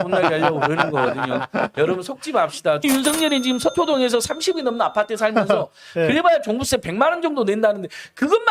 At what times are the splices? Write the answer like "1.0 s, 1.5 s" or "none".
2.8 s